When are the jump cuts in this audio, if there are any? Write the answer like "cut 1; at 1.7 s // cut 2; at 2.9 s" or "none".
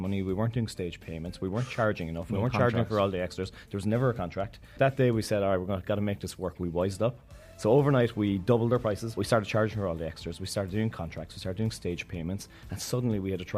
cut 1; at 4.7 s // cut 2; at 9.2 s

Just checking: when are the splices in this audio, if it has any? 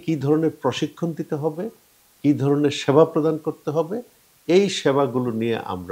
none

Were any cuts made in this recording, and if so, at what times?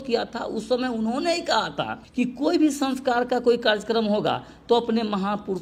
none

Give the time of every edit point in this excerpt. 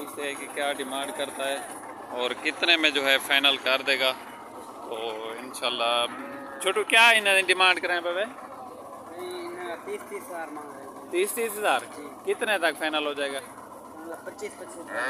none

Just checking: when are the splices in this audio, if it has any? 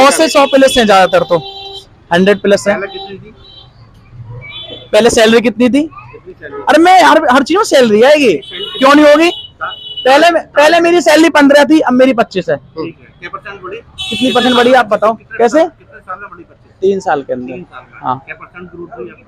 none

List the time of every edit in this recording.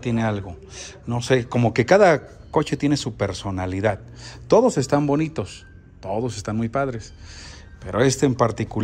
none

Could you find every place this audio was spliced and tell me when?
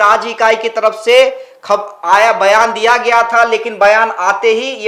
none

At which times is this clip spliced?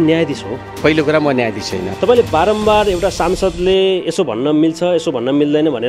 cut 1; at 0.8 s // cut 2; at 1.9 s

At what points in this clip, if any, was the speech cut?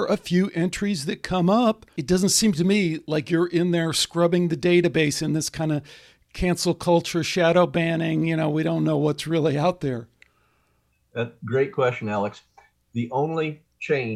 cut 1; at 1.9 s

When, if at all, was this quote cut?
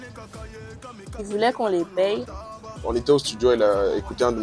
cut 1; at 2.3 s

